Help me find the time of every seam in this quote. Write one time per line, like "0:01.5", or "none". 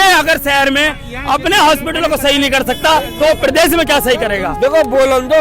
0:04.5